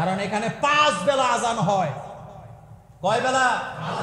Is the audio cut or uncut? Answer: uncut